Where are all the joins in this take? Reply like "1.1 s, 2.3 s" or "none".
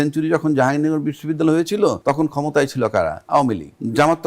2.0 s, 3.3 s